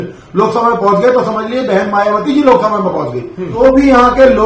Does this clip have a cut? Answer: yes; 1 cut; at 3.4 s

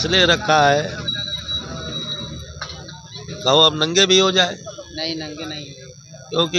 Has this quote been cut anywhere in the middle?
no; 0 cuts

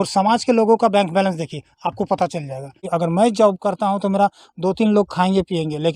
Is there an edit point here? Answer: yes; 1 cut; at 2.9 s

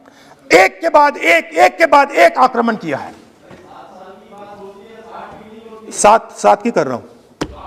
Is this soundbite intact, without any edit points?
yes; 0 cuts

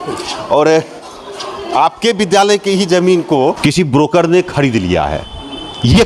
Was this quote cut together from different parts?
yes; 1 cut; at 3.6 s

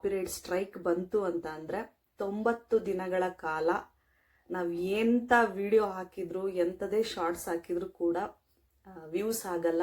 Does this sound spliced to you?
no; 0 cuts

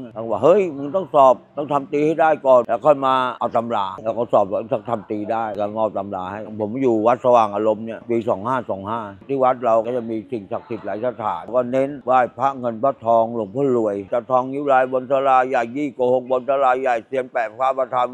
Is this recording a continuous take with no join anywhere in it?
yes; 0 cuts

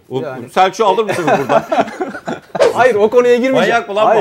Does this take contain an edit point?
yes; 1 cut; at 2.7 s

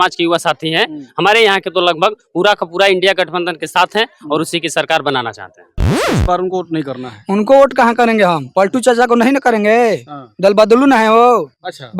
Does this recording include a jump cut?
yes; 1 cut; at 5.9 s

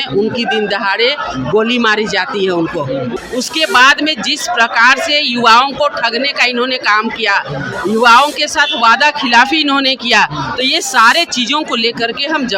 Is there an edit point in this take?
yes; 1 cut; at 3.1 s

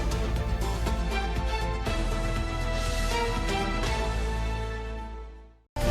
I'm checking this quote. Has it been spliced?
no; 0 cuts

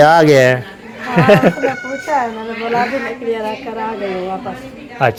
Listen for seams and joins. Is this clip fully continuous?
yes; 0 cuts

